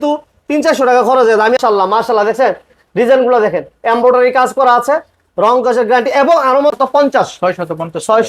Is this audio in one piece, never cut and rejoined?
no; 2 cuts; at 1.6 s, 6.7 s

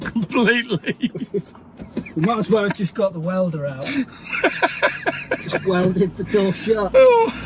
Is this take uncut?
yes; 0 cuts

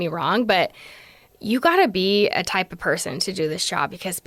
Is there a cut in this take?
no; 0 cuts

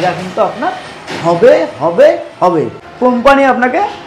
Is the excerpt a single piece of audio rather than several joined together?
no; 1 cut; at 2.8 s

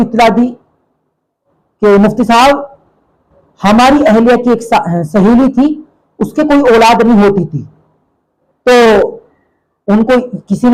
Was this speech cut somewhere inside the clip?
no; 0 cuts

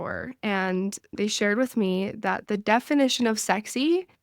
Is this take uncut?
no; 1 cut; at 1.1 s

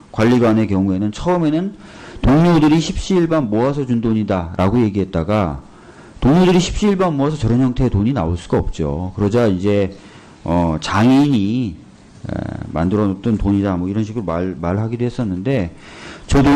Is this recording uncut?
no; 1 cut; at 14.9 s

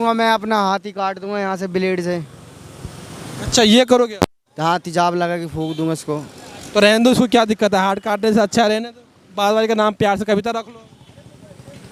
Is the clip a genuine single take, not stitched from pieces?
yes; 0 cuts

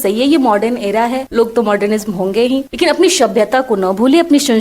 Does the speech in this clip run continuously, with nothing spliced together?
no; 2 cuts; at 1.2 s, 2.7 s

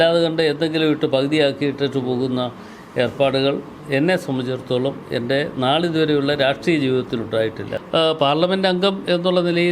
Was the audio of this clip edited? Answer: yes; 1 cut; at 7.7 s

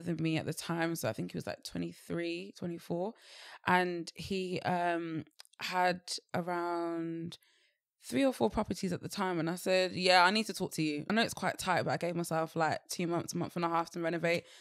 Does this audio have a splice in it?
yes; 1 cut; at 11.1 s

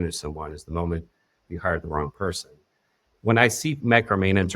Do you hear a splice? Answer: yes; 1 cut; at 3.1 s

